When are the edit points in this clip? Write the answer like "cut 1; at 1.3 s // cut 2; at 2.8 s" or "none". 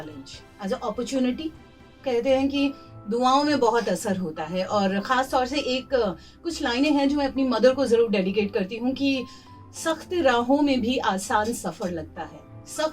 cut 1; at 2.0 s

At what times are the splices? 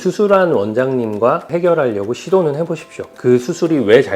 cut 1; at 1.5 s // cut 2; at 3.1 s

